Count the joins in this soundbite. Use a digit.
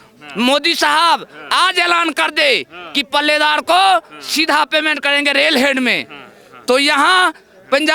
0